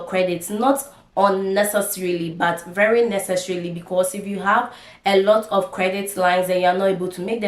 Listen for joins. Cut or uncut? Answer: uncut